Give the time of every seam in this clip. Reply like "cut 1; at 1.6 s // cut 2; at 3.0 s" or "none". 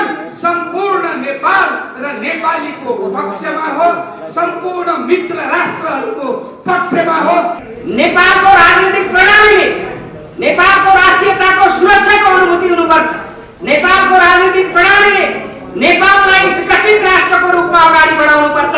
cut 1; at 7.6 s